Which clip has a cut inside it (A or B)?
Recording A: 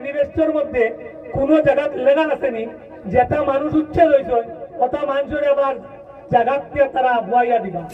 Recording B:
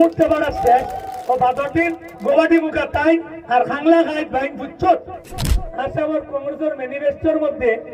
B